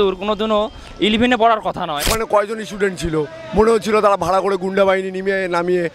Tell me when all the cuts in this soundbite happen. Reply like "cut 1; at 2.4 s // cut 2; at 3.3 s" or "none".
cut 1; at 2.0 s